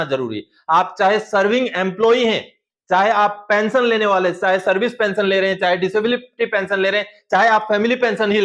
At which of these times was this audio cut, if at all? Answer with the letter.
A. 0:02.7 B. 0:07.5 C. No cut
C